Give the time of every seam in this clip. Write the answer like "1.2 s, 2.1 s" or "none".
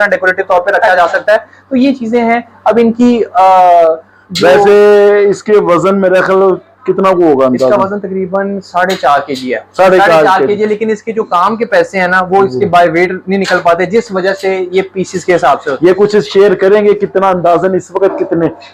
none